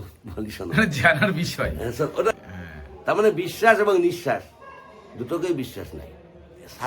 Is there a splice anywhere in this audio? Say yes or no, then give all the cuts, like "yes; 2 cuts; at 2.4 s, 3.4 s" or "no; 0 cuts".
yes; 1 cut; at 2.3 s